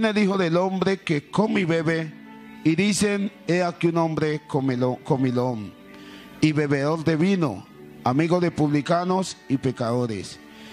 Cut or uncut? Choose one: cut